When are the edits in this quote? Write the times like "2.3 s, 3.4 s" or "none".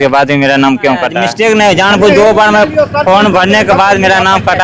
0.9 s